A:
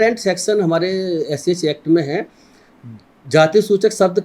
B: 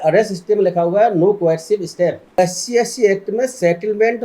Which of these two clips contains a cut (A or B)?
B